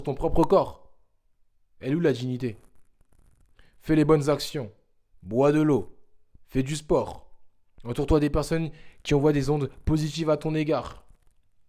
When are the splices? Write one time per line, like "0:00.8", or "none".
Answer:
none

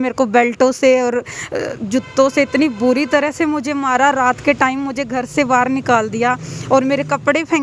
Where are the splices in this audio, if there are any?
none

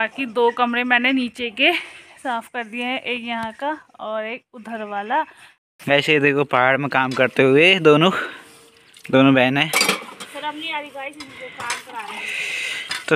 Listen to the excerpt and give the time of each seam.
0:05.6

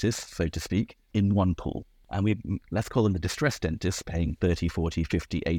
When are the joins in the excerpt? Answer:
0:01.0
0:01.9

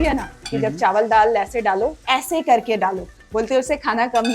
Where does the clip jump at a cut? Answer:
0:02.0
0:03.2

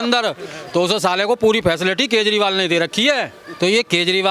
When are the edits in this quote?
0:03.4

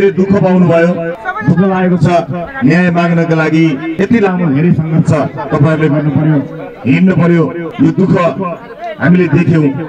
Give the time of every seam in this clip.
0:01.2
0:03.9
0:07.6

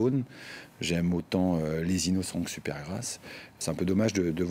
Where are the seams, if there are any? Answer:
0:03.6

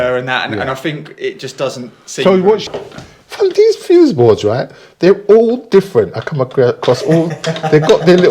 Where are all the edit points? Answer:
0:02.7

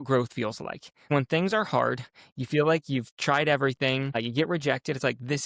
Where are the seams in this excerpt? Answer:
0:01.1
0:04.2

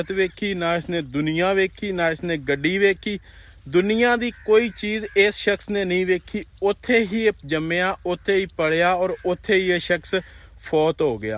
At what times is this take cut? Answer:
none

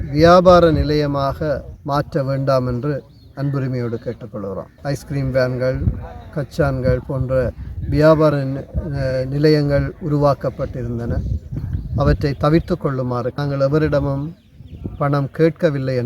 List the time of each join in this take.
0:04.7
0:13.4

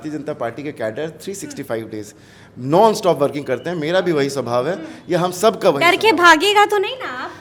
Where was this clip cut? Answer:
none

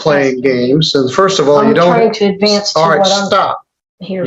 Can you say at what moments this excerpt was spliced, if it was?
none

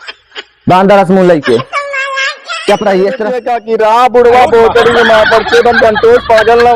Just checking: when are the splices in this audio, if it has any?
0:03.5

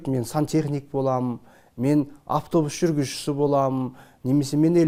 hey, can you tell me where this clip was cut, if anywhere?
none

